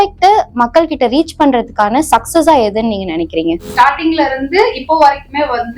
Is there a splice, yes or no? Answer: yes